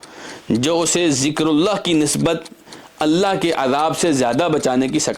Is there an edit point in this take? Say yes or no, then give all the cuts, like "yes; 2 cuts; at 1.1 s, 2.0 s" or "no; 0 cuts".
no; 0 cuts